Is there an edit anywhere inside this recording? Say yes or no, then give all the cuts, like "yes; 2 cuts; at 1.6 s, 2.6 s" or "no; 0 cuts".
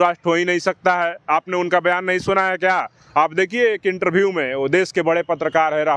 no; 0 cuts